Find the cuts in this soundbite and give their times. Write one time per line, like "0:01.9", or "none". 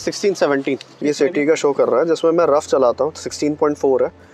0:00.9